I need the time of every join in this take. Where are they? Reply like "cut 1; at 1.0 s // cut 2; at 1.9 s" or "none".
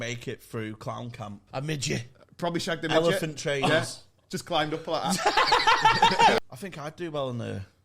cut 1; at 1.5 s // cut 2; at 6.4 s